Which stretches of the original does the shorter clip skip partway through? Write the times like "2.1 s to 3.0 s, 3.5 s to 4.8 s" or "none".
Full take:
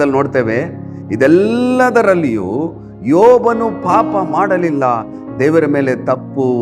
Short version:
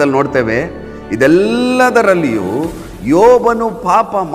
none